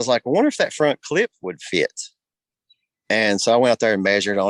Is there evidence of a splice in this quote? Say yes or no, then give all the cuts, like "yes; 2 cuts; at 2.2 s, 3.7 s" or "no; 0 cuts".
no; 0 cuts